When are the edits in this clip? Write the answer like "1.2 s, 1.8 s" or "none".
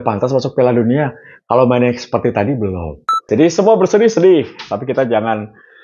3.2 s